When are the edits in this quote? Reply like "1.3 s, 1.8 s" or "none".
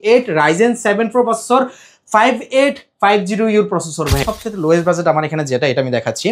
4.3 s